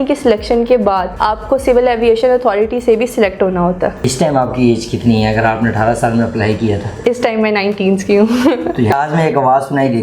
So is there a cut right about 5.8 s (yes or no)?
no